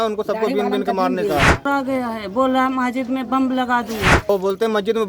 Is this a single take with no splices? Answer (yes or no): no